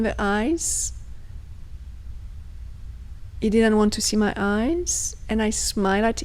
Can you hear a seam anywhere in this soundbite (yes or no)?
no